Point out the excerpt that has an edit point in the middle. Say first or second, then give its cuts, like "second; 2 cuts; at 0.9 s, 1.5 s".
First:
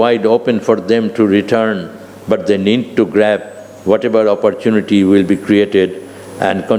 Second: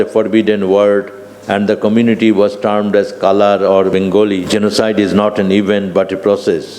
second; 1 cut; at 3.9 s